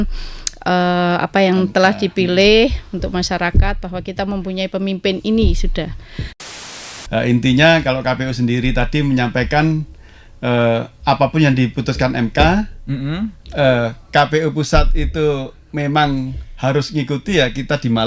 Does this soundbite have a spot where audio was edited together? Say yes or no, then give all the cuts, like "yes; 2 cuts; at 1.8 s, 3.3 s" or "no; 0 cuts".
yes; 1 cut; at 6.5 s